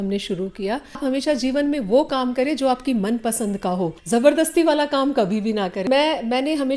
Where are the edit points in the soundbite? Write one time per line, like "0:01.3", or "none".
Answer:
0:01.0
0:04.0
0:05.9